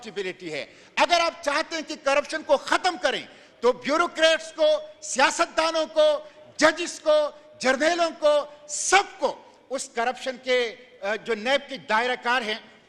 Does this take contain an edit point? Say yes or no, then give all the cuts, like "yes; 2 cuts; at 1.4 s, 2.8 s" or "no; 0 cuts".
no; 0 cuts